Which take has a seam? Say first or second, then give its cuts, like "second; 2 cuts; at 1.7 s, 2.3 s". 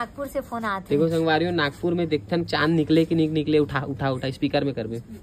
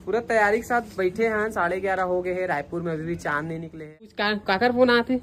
second; 1 cut; at 4.0 s